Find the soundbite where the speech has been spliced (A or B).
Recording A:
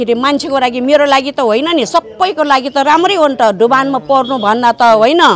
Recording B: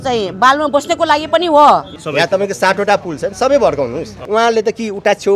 B